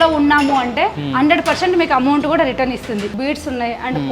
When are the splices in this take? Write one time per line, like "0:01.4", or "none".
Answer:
0:01.0
0:03.1